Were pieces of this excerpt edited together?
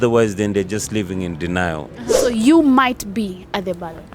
yes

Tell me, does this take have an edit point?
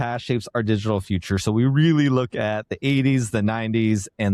no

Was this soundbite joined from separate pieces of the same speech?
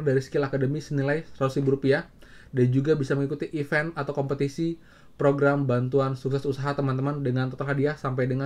no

